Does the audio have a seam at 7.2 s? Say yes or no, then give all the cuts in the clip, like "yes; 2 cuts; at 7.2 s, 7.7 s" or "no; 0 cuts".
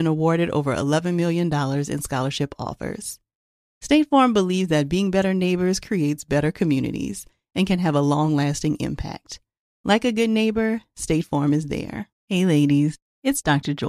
no; 1 cut; at 12.0 s